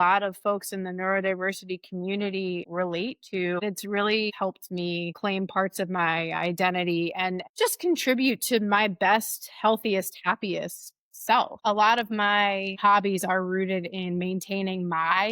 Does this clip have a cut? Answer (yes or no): yes